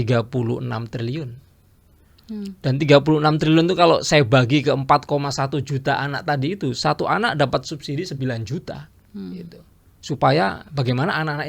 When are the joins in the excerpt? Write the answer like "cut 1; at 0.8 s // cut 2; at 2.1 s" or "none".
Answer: none